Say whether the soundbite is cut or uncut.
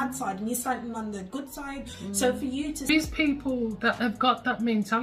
cut